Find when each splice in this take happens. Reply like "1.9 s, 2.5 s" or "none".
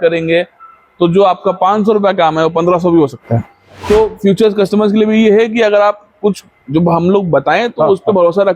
3.7 s